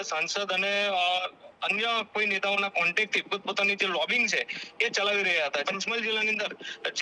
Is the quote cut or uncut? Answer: cut